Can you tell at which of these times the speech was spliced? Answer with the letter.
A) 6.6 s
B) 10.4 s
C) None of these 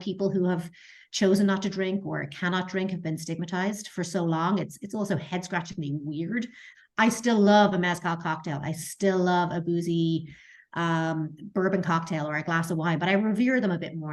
A